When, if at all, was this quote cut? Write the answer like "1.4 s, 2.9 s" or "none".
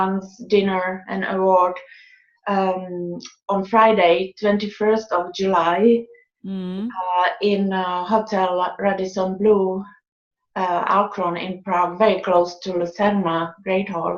11.1 s